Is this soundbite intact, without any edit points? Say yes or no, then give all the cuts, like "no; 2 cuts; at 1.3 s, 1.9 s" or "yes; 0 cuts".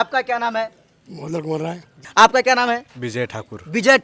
no; 1 cut; at 2.1 s